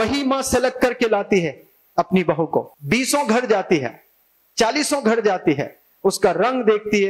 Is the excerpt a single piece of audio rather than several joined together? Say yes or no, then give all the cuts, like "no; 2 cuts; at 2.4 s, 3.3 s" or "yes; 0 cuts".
no; 1 cut; at 2.7 s